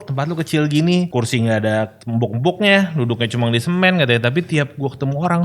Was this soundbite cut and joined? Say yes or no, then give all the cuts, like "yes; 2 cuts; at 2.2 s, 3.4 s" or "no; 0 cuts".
yes; 2 cuts; at 1.1 s, 2.0 s